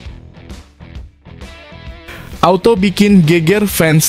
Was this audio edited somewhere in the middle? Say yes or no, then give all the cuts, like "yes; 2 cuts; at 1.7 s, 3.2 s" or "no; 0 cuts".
yes; 1 cut; at 2.4 s